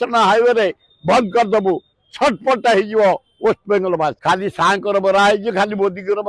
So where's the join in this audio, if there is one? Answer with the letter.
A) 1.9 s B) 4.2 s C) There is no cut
B